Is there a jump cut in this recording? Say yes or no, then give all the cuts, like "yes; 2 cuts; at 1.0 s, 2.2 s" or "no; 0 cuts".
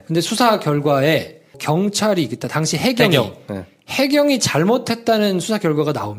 yes; 1 cut; at 3.7 s